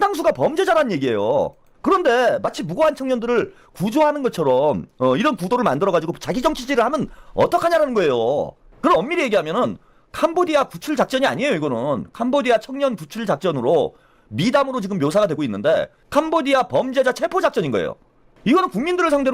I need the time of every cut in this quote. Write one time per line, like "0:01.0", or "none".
0:01.6
0:08.6
0:16.0